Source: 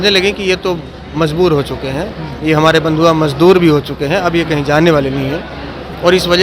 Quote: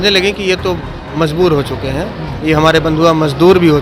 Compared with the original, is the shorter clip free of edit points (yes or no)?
yes